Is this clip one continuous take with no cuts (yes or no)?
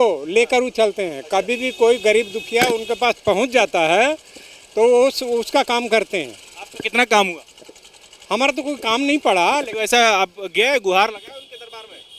yes